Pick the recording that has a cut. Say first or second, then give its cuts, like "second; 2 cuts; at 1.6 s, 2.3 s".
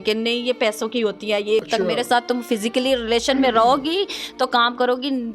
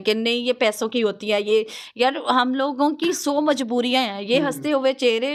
first; 1 cut; at 1.7 s